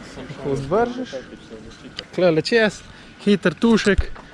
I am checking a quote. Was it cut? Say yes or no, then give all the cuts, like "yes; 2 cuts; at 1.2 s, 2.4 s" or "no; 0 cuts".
yes; 1 cut; at 2.0 s